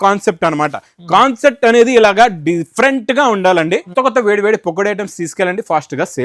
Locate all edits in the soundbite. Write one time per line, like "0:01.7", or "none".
0:03.9